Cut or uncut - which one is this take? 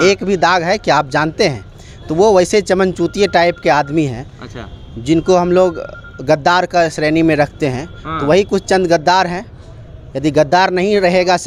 uncut